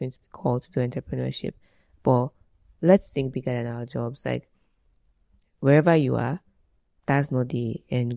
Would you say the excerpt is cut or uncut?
uncut